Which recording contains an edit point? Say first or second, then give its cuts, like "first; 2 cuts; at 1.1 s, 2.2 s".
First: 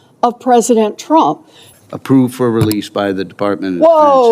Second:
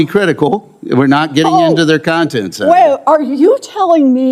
first; 1 cut; at 1.6 s